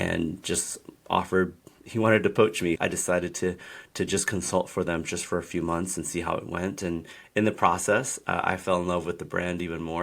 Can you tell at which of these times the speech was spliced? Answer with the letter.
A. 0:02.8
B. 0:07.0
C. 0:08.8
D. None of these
A